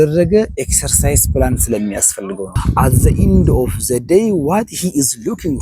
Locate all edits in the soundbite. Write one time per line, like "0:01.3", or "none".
0:02.6